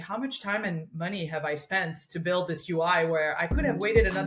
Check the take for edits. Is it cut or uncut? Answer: uncut